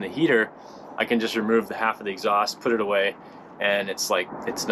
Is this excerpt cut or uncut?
uncut